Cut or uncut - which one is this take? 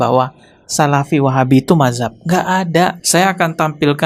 cut